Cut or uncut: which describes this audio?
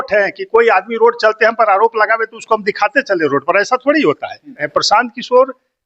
cut